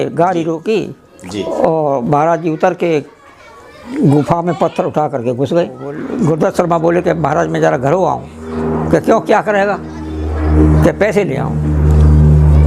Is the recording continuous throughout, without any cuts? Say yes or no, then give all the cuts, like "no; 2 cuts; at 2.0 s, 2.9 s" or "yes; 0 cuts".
no; 1 cut; at 6.0 s